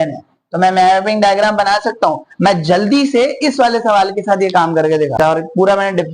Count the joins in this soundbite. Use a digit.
1